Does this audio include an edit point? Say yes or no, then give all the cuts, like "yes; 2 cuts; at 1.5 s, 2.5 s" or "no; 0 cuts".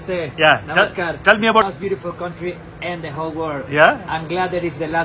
yes; 1 cut; at 1.6 s